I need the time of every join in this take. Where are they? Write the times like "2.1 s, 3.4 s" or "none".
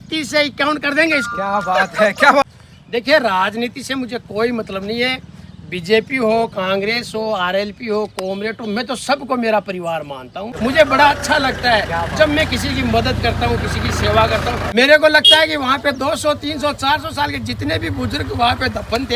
2.4 s, 10.5 s, 14.7 s